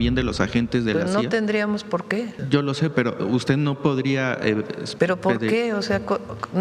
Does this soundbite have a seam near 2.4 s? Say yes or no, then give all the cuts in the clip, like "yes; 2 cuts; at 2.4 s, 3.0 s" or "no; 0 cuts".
yes; 2 cuts; at 2.4 s, 4.8 s